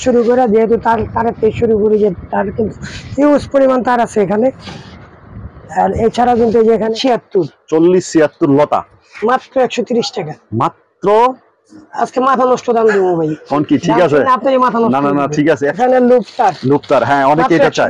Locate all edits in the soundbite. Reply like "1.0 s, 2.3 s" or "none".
6.9 s, 15.8 s